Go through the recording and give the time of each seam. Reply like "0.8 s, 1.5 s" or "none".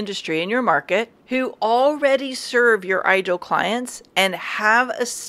1.2 s